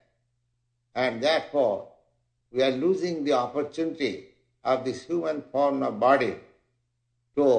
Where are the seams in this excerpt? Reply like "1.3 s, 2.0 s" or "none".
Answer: none